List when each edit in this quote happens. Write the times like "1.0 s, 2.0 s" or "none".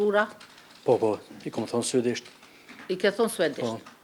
none